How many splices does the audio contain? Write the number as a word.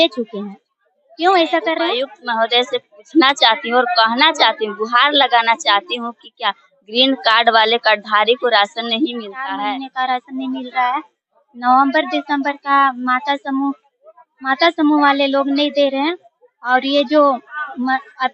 two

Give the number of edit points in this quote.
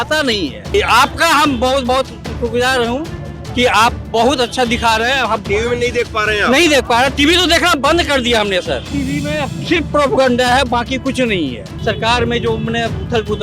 three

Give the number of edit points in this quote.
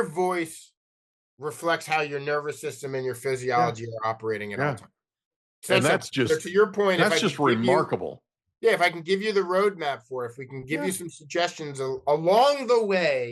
zero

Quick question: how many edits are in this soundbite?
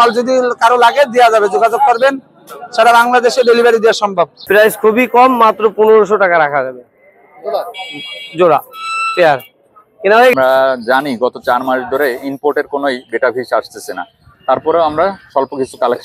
two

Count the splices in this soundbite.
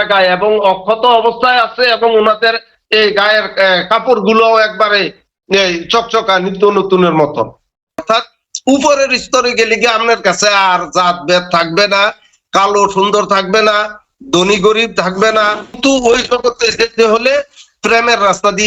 two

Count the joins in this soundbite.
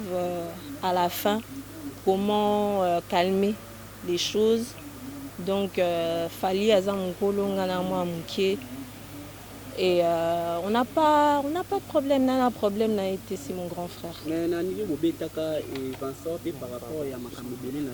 zero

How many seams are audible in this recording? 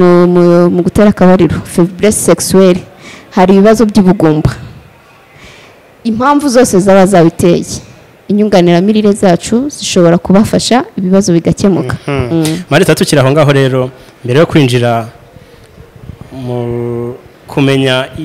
zero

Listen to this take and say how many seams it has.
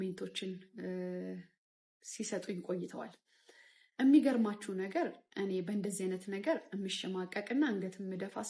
zero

